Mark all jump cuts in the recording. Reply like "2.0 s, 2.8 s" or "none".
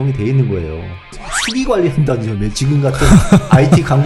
1.2 s